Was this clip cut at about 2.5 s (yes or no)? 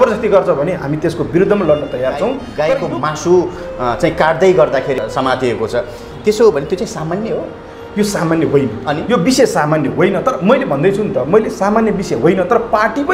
yes